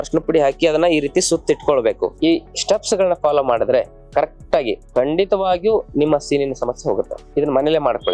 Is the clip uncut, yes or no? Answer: no